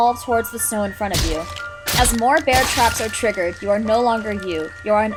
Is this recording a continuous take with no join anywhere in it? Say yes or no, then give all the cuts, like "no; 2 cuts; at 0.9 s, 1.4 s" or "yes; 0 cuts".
yes; 0 cuts